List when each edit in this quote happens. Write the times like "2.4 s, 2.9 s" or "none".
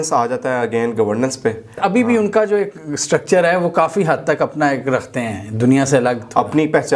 1.8 s